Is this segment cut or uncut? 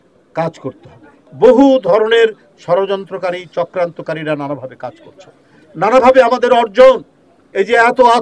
cut